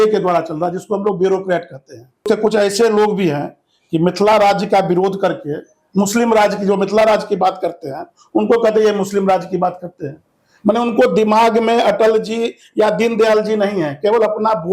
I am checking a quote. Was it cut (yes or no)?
yes